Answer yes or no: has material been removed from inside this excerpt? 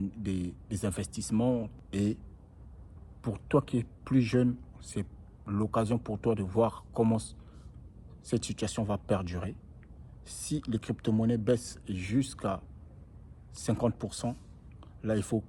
yes